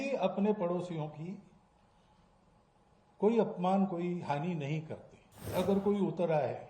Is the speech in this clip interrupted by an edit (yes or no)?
yes